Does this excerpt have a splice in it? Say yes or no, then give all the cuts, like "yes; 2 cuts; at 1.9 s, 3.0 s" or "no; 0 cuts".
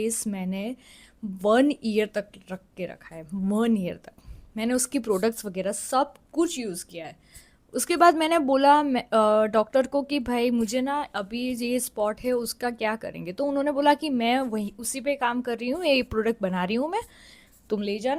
no; 0 cuts